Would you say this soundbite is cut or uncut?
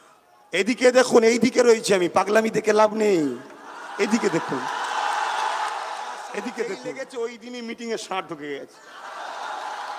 cut